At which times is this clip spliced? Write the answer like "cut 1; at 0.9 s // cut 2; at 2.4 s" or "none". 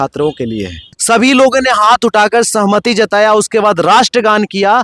cut 1; at 0.9 s